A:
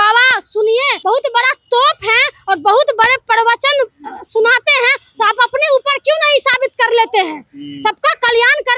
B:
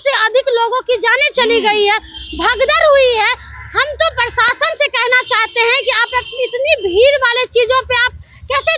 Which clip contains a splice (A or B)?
A